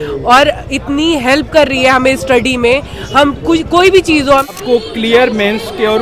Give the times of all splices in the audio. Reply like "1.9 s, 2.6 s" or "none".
4.5 s